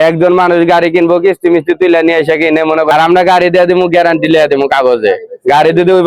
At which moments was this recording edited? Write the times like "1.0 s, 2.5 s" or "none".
2.9 s